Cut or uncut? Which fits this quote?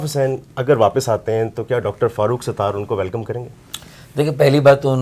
uncut